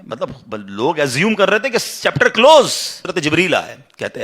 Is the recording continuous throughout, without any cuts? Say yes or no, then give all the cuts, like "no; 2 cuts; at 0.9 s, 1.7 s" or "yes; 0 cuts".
no; 1 cut; at 3.1 s